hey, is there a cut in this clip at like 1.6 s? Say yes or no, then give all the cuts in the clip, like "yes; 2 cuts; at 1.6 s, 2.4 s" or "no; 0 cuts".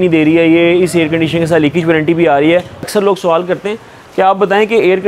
no; 1 cut; at 2.9 s